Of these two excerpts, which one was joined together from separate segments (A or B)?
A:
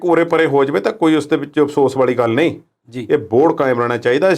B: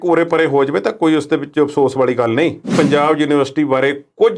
B